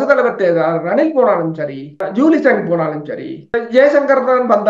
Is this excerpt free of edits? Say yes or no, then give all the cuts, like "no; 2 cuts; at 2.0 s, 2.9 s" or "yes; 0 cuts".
no; 2 cuts; at 2.0 s, 3.5 s